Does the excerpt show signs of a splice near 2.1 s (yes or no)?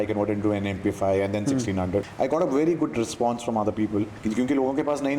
yes